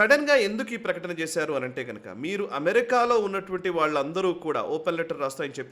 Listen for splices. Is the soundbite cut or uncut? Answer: uncut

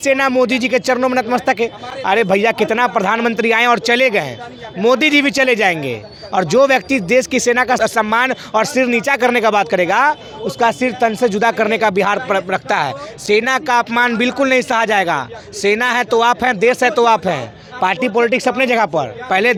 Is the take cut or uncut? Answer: uncut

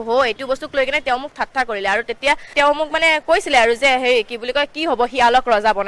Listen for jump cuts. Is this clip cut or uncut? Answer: cut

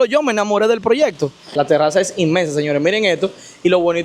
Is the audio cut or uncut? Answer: cut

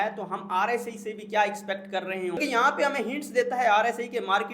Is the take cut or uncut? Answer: cut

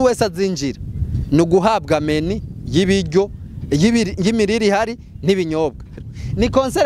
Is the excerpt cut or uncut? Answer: cut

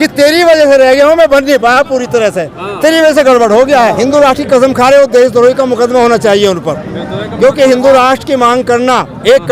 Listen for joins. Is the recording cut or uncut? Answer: cut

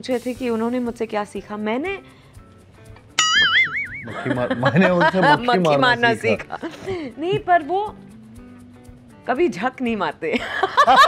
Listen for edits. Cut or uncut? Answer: uncut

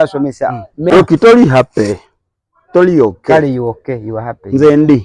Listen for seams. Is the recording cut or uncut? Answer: cut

